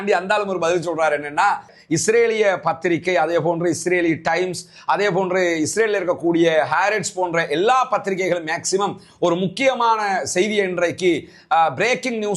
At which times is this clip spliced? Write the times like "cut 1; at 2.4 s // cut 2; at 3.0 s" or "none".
cut 1; at 1.7 s